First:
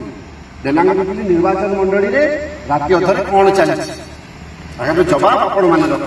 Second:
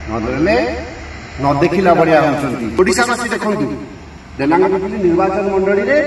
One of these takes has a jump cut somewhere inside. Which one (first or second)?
second